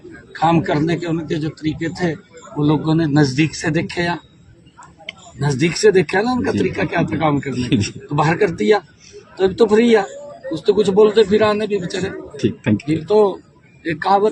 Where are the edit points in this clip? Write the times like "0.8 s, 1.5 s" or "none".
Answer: 8.0 s